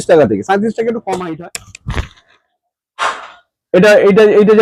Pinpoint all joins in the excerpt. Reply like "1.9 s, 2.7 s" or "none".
1.3 s

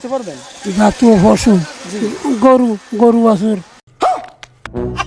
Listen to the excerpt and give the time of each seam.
none

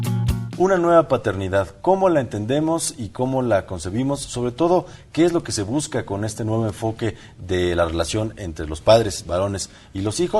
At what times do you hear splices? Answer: 1.3 s

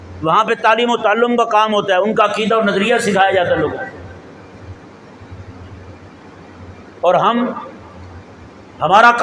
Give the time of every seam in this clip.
none

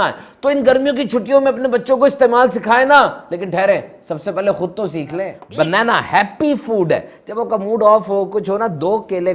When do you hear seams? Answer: 5.4 s

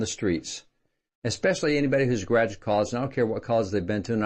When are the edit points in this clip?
none

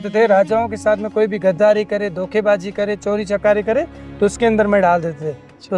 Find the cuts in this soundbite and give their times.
none

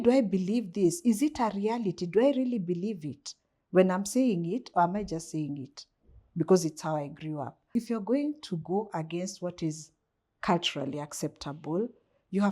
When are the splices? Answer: 7.7 s

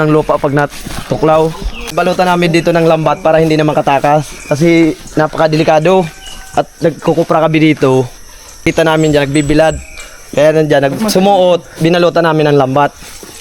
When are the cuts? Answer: 1.7 s, 8.7 s

